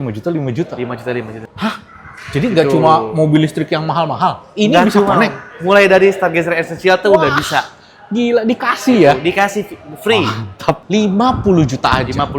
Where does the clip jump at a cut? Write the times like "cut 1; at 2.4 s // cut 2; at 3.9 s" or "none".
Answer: cut 1; at 1.4 s // cut 2; at 10.8 s